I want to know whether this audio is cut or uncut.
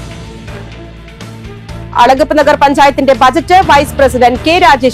uncut